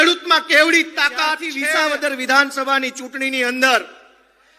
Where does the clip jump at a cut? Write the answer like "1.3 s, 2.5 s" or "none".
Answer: 1.5 s